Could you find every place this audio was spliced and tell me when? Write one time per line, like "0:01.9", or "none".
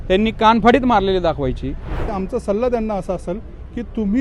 0:02.1